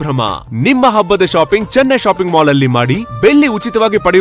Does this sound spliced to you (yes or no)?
no